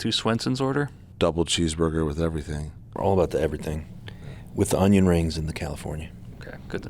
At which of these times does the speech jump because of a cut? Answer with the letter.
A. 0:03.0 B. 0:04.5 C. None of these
A